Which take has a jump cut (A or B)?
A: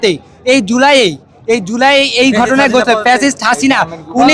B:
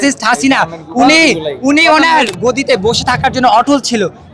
B